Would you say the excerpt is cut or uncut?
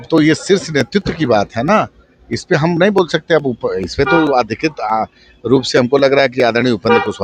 uncut